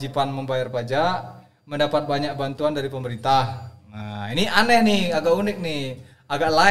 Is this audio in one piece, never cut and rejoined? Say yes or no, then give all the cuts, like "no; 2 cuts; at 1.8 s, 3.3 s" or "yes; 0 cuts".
yes; 0 cuts